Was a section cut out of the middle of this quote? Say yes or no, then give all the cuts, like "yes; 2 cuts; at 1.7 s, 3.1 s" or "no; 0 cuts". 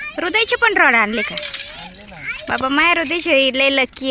no; 0 cuts